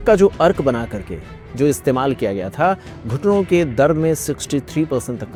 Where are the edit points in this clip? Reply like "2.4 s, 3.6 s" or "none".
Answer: none